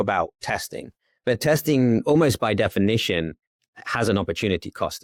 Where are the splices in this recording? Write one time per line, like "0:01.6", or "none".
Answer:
none

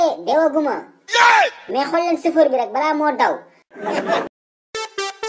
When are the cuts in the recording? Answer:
0:04.3

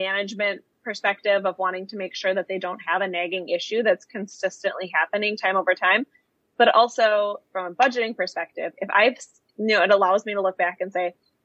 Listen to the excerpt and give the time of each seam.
none

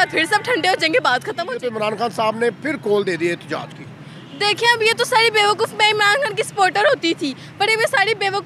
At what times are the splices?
0:01.6

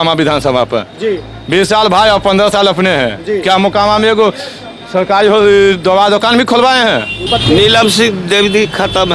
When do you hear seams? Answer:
0:07.2

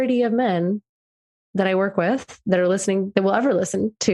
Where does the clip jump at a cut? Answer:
none

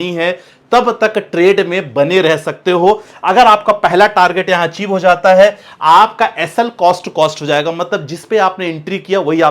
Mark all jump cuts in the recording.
none

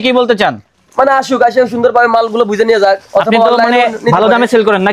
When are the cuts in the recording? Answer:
none

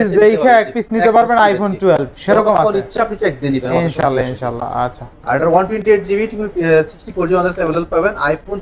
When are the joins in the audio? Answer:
none

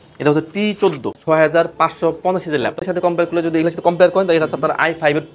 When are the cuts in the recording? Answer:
0:01.2
0:02.8

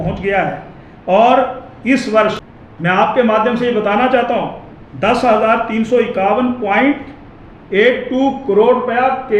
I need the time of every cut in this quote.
0:02.5

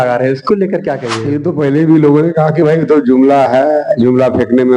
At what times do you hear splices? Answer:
0:01.1

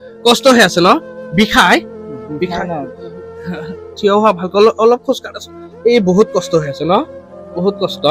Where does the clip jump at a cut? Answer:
none

